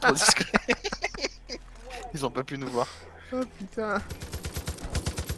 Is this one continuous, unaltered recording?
no; 1 cut; at 4.3 s

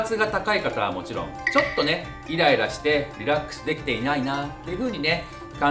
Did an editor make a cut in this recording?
yes; 1 cut; at 1.3 s

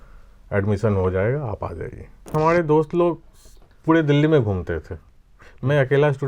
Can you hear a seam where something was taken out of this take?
yes; 1 cut; at 2.3 s

